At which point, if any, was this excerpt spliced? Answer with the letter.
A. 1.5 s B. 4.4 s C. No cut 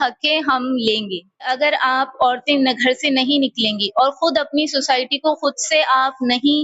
A